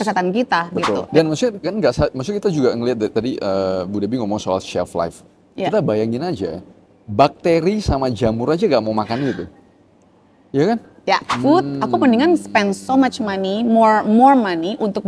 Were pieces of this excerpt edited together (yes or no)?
yes